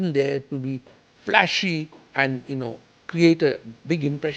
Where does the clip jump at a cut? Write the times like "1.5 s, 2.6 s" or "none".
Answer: none